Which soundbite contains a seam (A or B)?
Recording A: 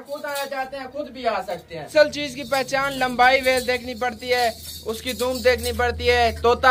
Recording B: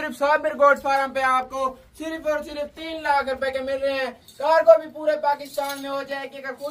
A